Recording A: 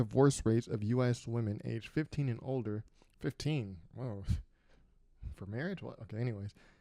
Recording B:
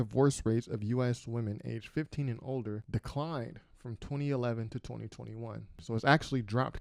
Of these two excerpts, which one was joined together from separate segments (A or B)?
B